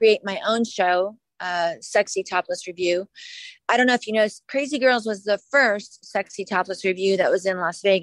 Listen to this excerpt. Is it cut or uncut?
uncut